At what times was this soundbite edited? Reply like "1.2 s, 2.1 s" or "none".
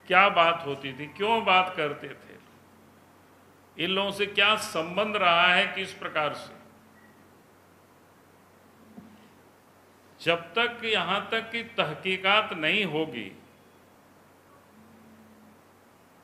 none